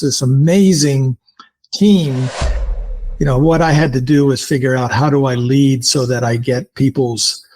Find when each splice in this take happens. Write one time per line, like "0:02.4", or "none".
0:02.6